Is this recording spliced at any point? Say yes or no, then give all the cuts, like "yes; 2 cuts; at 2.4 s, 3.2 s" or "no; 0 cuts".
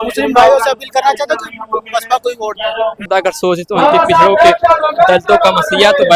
yes; 1 cut; at 3.1 s